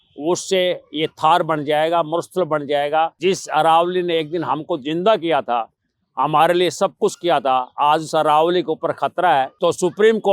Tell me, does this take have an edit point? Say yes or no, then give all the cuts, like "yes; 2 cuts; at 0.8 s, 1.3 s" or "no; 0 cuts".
yes; 2 cuts; at 3.1 s, 9.5 s